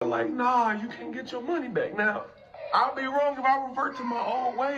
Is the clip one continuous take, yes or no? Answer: yes